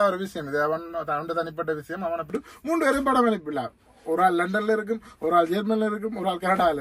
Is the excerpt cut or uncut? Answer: cut